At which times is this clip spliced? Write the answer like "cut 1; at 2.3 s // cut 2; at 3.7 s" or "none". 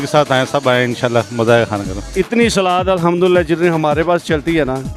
cut 1; at 2.0 s